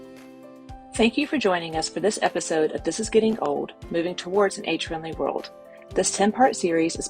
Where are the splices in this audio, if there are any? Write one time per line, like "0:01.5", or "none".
0:01.0